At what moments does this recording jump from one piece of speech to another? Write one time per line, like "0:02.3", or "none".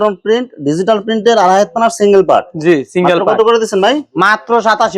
none

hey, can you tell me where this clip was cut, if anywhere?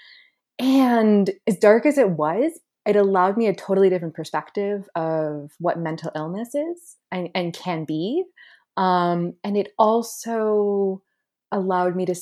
0:01.4

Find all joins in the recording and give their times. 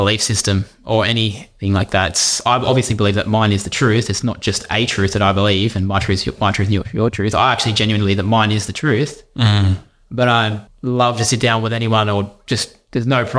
0:10.7

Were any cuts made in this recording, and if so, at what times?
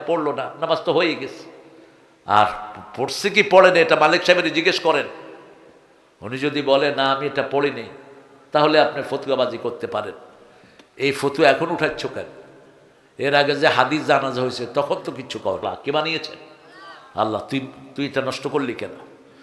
0:15.6

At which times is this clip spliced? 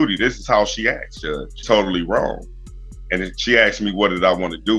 none

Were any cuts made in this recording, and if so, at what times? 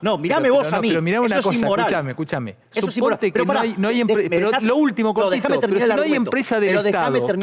none

